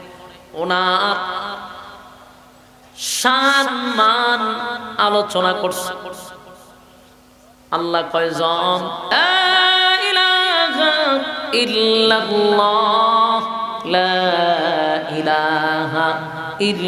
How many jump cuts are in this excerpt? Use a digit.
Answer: 1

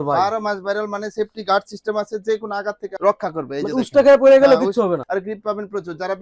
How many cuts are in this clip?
1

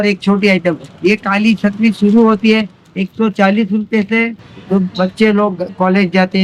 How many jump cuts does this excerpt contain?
1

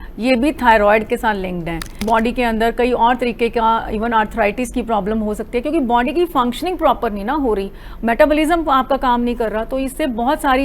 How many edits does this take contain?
1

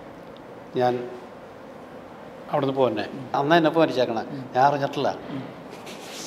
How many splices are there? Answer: 1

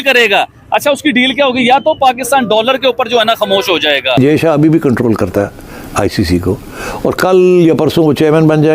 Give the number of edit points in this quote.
1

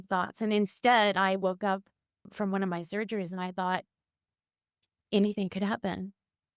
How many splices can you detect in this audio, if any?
1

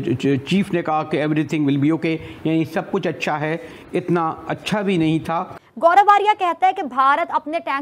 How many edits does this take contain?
1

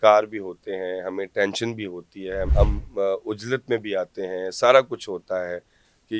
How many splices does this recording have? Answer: 1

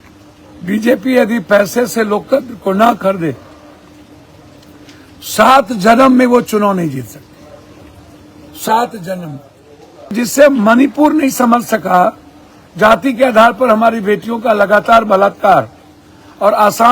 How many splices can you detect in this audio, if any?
1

